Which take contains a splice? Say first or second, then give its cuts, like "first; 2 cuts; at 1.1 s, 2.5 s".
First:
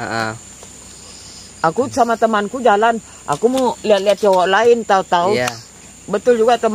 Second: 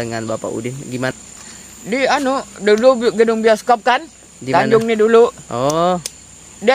second; 1 cut; at 1.2 s